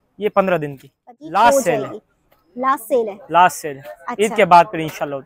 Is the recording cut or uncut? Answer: cut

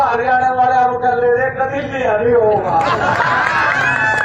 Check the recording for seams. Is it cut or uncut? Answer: uncut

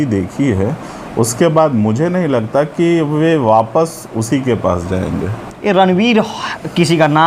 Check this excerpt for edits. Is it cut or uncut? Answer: cut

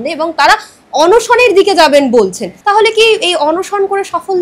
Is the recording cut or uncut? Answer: cut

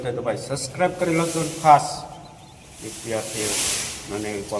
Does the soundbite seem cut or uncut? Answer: uncut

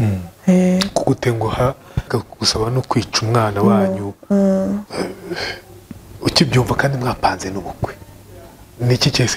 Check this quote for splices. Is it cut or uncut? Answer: cut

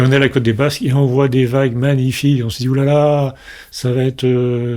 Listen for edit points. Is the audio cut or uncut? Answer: uncut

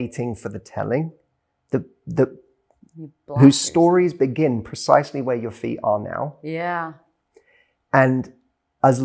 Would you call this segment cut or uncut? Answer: uncut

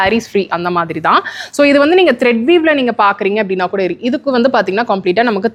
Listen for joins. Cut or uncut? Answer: uncut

